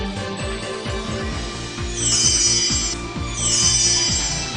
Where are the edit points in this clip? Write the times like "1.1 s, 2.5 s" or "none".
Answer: 1.6 s

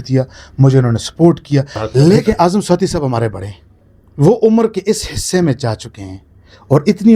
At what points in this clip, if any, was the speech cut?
2.2 s

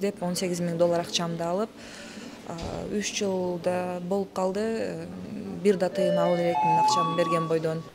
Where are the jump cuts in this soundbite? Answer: none

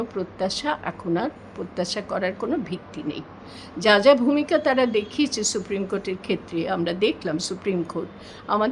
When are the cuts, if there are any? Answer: none

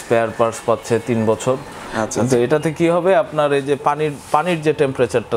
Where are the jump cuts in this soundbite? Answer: 1.8 s

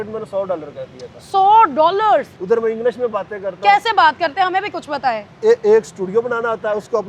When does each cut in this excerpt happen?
2.3 s

